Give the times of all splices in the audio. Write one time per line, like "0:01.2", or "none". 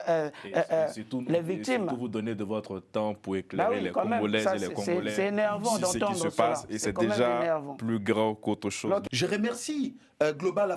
0:09.0